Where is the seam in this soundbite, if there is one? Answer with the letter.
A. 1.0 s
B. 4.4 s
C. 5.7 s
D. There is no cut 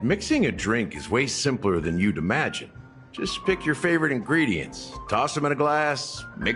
D